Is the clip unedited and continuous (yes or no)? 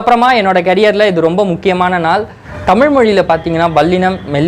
no